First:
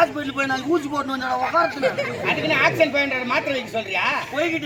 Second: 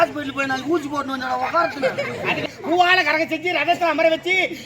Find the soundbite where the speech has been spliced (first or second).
second